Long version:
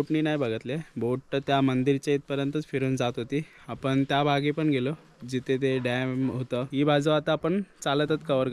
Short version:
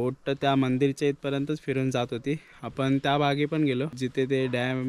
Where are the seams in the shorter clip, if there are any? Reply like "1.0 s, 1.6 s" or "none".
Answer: 4.0 s